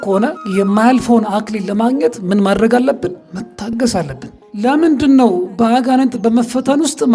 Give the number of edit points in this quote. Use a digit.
1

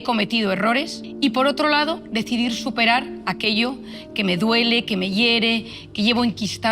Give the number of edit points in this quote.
1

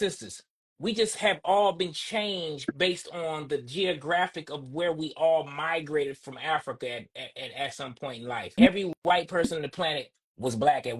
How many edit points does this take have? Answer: 1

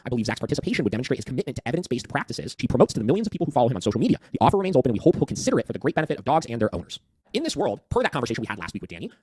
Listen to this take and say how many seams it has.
2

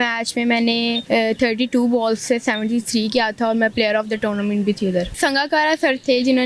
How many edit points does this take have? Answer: 2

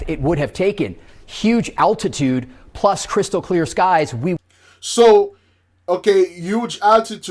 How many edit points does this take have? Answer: 0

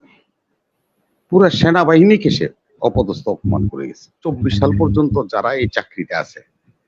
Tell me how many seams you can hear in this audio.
1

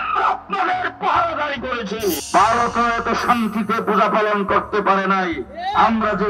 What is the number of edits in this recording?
1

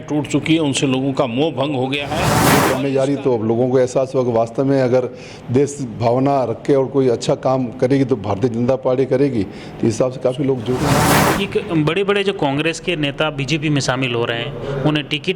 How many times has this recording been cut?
2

